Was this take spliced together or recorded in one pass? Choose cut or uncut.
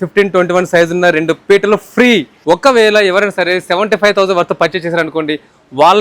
cut